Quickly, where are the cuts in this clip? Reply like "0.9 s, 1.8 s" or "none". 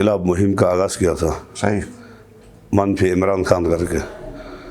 none